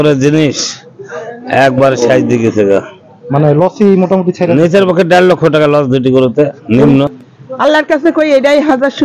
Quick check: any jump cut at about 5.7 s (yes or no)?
no